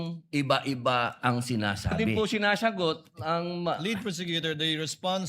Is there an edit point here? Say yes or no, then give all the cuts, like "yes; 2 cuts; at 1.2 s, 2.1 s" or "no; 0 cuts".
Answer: yes; 1 cut; at 2.0 s